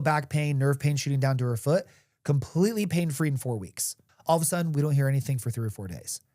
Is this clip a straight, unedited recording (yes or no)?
no